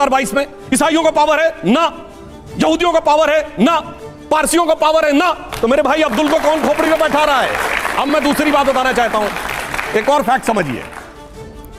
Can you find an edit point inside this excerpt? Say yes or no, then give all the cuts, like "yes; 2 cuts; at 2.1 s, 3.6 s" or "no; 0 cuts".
no; 0 cuts